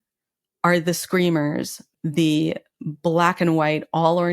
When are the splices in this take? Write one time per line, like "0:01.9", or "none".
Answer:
0:01.8